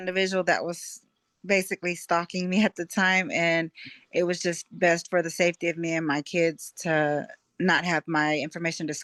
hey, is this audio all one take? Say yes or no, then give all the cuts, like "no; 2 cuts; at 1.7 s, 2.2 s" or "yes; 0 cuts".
yes; 0 cuts